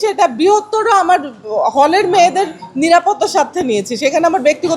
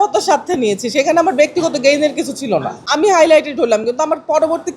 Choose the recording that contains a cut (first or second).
second